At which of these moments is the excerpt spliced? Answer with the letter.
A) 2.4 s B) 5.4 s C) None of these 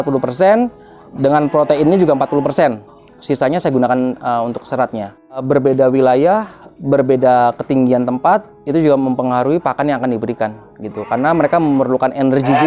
B